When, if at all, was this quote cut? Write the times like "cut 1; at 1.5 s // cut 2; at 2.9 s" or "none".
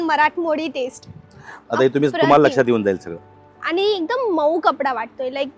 cut 1; at 1.5 s